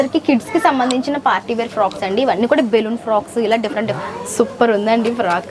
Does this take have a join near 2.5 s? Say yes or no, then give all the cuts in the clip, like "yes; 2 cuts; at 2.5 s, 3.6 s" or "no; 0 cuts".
no; 1 cut; at 4.0 s